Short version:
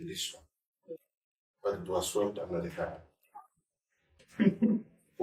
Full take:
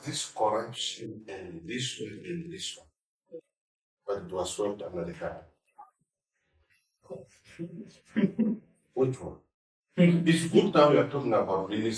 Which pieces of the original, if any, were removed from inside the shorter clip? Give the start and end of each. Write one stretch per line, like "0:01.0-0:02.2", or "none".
0:06.6-0:08.0